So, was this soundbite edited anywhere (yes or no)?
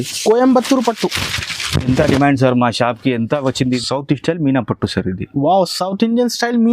yes